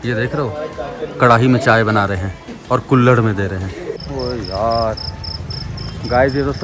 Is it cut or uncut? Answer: cut